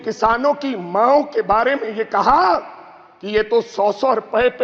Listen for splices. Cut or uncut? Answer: uncut